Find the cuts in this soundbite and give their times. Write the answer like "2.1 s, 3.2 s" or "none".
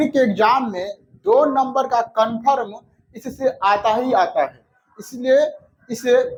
none